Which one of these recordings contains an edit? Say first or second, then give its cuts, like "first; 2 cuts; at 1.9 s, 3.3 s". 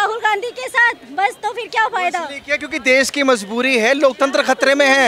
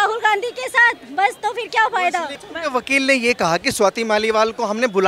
second; 1 cut; at 2.4 s